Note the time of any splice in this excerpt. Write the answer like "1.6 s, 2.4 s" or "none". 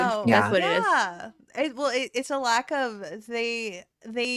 none